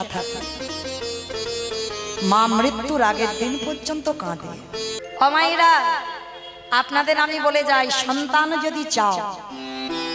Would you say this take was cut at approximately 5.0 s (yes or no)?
yes